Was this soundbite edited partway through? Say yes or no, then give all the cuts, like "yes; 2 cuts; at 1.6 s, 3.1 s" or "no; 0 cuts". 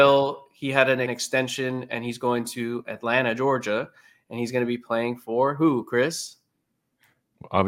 yes; 1 cut; at 1.1 s